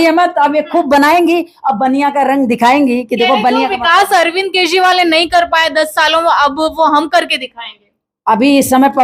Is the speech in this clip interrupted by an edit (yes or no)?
no